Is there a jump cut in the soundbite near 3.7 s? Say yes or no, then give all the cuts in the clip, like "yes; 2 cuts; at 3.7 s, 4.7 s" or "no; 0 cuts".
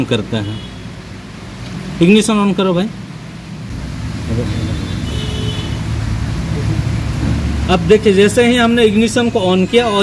yes; 1 cut; at 3.7 s